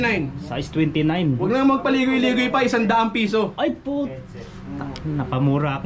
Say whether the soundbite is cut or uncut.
uncut